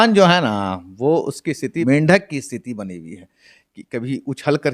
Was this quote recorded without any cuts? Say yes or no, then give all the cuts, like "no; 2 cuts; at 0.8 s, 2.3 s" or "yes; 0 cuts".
no; 1 cut; at 1.8 s